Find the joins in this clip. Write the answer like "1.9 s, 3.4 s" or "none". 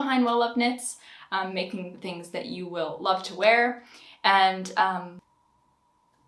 5.2 s